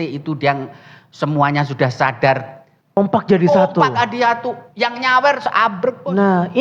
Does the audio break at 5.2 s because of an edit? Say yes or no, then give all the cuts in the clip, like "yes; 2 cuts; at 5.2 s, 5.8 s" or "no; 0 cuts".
no; 1 cut; at 3.0 s